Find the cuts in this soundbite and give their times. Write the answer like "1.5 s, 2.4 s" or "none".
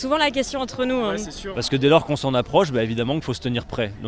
1.4 s